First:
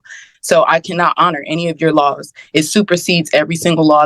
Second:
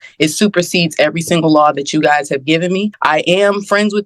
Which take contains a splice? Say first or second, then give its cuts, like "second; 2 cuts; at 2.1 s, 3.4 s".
second; 1 cut; at 2.9 s